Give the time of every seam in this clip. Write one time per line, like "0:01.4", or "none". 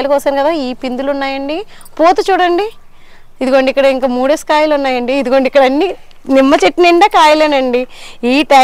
none